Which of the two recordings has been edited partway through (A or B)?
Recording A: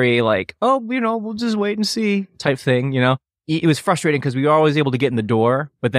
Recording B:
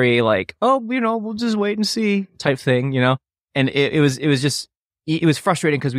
A